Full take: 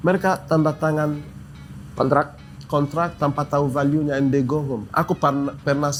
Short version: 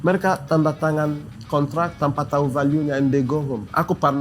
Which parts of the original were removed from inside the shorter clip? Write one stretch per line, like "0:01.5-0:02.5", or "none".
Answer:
0:01.3-0:02.5